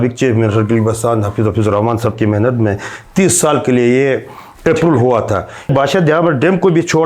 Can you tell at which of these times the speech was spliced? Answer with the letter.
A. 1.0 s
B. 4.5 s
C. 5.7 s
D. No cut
C